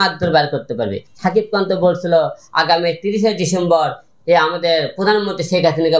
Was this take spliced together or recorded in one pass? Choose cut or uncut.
cut